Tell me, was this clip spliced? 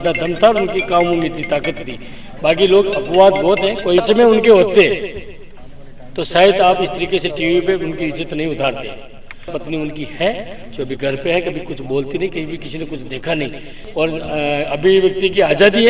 yes; 3 cuts; at 4.0 s, 9.5 s, 13.8 s

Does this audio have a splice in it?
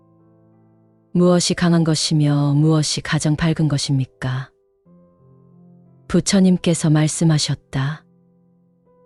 no; 0 cuts

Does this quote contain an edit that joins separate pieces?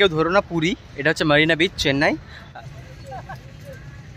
yes; 1 cut; at 2.5 s

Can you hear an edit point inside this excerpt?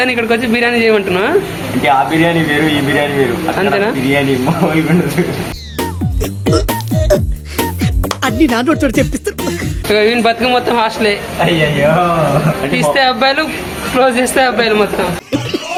no; 0 cuts

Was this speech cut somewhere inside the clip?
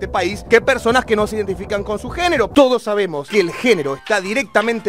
yes; 1 cut; at 2.5 s

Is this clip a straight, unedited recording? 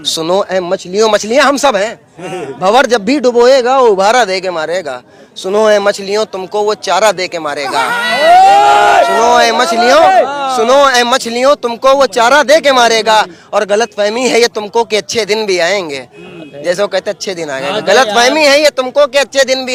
yes; 0 cuts

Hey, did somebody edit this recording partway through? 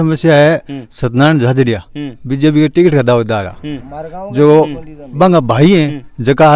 no; 0 cuts

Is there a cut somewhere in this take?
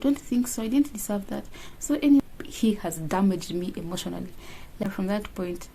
yes; 2 cuts; at 2.2 s, 4.8 s

